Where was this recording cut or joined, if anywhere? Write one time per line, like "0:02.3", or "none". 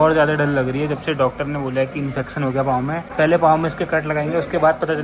none